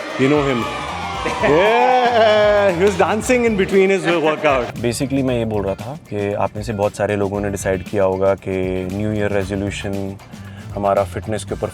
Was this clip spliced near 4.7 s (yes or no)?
yes